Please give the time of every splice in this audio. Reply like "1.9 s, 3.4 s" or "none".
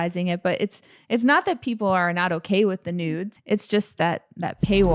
3.3 s